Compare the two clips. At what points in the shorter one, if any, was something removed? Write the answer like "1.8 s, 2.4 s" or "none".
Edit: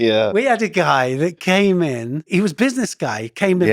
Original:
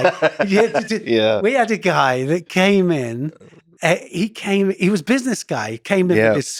2.3 s

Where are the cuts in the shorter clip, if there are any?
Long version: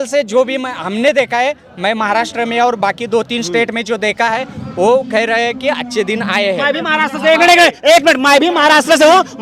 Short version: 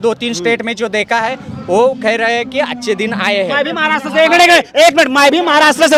none

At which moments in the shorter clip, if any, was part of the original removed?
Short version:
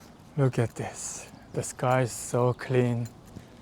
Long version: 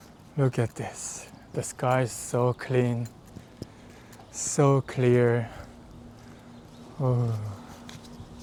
none

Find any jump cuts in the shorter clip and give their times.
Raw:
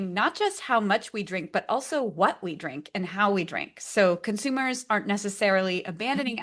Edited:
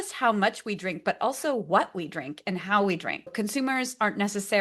3.3 s

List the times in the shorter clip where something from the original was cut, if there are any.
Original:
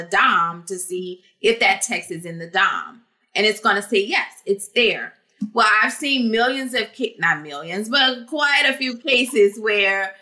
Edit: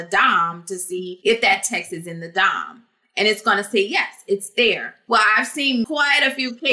1.1 s, 4.9 s, 5.9 s

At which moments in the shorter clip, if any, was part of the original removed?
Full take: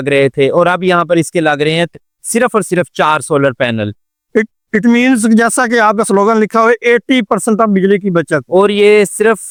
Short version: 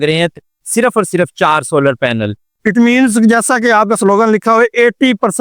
2.5 s

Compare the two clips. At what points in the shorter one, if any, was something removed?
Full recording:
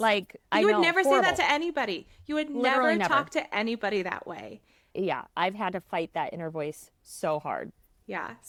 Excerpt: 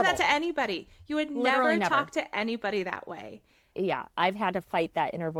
none

